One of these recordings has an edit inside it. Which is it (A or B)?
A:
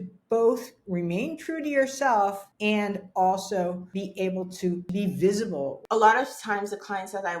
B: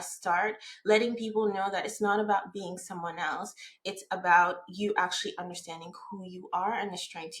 A